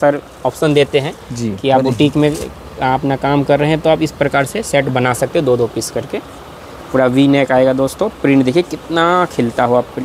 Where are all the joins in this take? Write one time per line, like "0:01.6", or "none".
none